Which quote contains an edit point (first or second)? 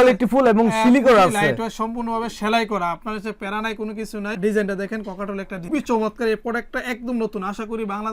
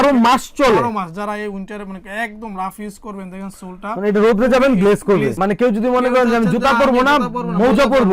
second